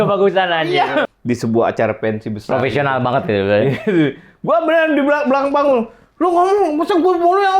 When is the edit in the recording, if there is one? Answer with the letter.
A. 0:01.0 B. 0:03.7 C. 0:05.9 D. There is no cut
A